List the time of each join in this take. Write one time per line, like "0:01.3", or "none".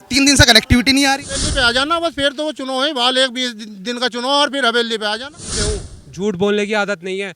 0:01.5
0:05.6